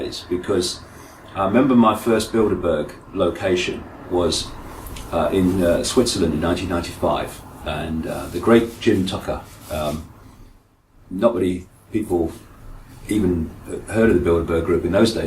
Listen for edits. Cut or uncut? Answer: cut